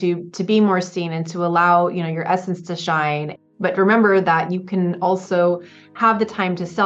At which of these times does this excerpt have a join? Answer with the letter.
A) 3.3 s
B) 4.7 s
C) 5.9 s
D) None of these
A